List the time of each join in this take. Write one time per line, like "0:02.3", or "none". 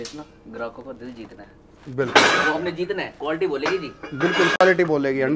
none